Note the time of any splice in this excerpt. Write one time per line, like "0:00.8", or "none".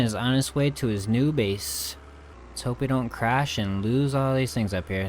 none